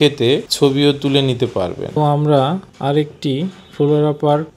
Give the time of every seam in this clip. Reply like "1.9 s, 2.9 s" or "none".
1.9 s